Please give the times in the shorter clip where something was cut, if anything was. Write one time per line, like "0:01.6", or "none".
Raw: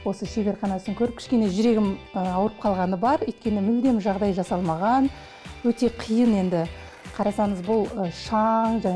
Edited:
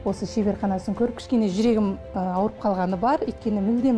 none

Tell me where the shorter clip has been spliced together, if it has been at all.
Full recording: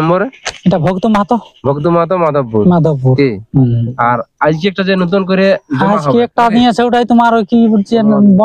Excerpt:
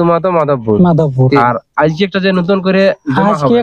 0:01.4

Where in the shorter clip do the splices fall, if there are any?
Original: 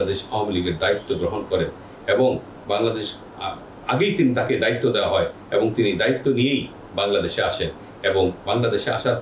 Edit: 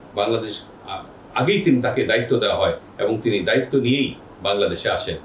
none

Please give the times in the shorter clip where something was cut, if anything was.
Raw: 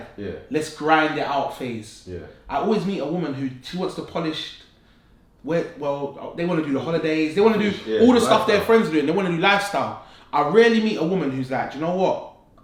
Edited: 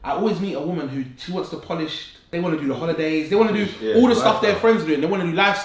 0:02.2

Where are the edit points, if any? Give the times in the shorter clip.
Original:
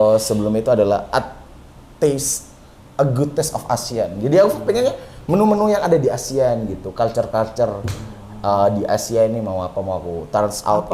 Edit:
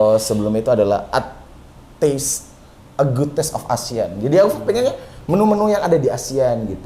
none

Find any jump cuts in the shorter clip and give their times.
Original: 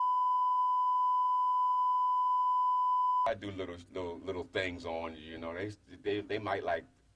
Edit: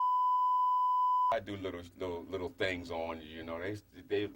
0:01.3

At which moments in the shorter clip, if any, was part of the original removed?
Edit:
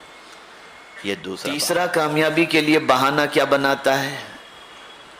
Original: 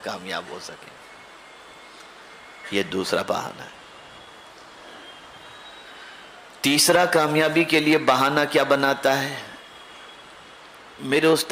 0:01.5

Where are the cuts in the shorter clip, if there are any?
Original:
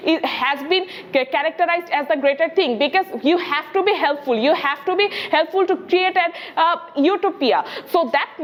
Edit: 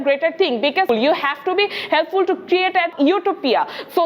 0:00.9
0:02.9

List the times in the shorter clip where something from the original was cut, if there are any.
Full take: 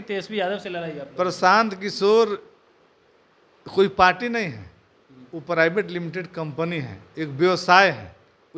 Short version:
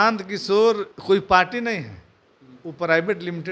0:00.9

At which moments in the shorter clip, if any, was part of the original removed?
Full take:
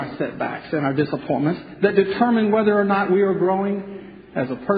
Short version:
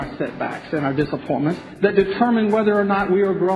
none

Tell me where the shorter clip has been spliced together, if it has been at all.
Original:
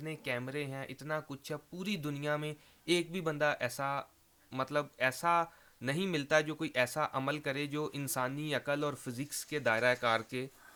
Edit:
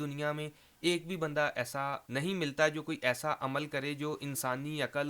0:02.0

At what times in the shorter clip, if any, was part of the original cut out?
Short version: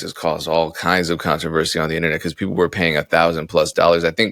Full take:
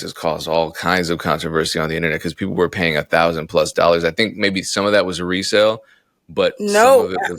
none

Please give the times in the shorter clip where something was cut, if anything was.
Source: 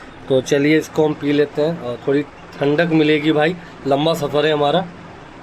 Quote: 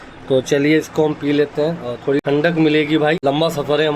0:02.2
0:03.2

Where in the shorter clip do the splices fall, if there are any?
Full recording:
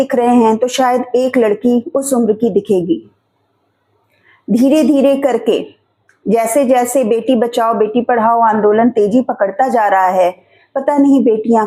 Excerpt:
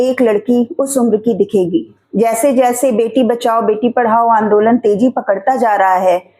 0:02.0

